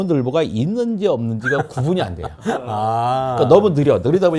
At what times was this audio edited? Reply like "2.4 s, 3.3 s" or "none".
none